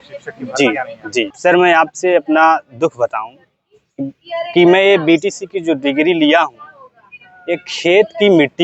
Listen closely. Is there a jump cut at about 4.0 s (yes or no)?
no